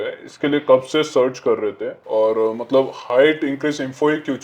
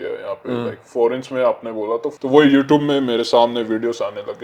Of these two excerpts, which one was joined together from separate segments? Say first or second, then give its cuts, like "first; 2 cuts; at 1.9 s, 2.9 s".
second; 1 cut; at 2.1 s